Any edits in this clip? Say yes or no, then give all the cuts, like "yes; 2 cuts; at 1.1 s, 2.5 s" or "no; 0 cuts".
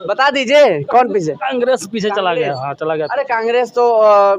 no; 0 cuts